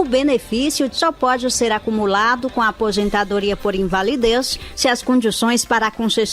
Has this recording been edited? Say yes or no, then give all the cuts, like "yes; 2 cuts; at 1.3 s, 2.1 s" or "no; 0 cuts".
yes; 1 cut; at 0.9 s